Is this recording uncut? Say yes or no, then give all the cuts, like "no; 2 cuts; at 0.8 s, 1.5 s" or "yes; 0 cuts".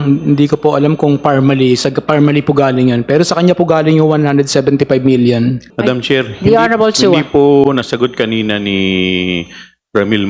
no; 1 cut; at 5.7 s